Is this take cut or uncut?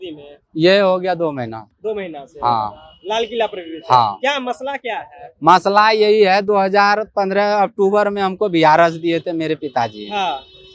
uncut